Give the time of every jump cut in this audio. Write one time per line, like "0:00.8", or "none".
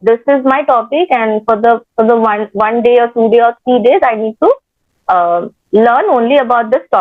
none